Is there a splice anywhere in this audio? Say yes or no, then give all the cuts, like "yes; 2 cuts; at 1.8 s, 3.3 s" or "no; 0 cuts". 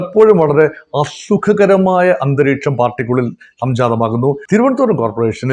yes; 1 cut; at 4.4 s